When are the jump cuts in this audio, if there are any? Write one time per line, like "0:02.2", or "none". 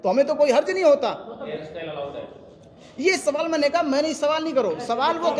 0:01.5